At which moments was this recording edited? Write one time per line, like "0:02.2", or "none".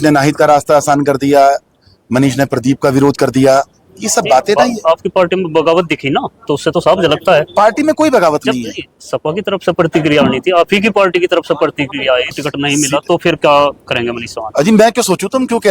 0:12.3